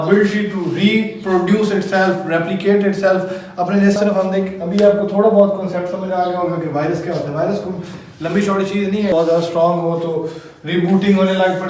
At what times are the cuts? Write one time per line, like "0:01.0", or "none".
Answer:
0:04.0
0:09.1